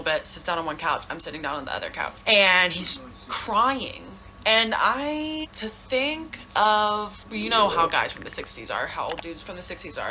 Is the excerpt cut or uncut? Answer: cut